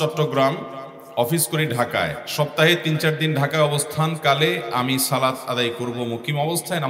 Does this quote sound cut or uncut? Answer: uncut